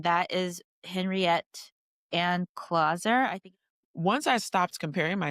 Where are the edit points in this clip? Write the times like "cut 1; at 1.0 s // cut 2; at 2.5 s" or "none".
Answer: cut 1; at 3.4 s

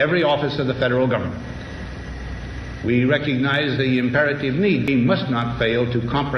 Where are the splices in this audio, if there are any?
cut 1; at 4.9 s

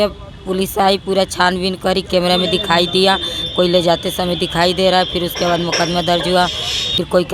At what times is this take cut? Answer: none

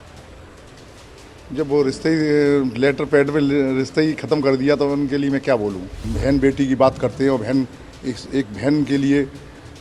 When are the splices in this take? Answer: cut 1; at 6.1 s

